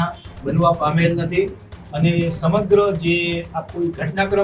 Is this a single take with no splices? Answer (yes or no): yes